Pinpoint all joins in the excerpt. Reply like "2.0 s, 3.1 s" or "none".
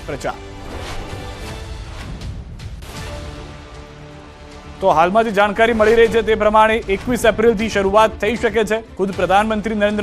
8.9 s